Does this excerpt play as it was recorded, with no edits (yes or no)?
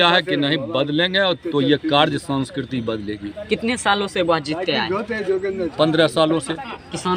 yes